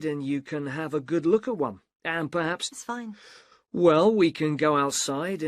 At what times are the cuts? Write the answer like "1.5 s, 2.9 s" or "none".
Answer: 2.6 s